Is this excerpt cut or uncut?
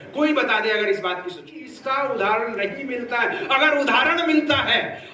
cut